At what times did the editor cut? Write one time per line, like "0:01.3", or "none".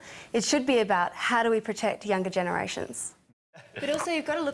0:03.6